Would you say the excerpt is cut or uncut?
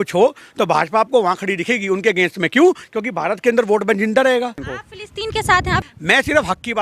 cut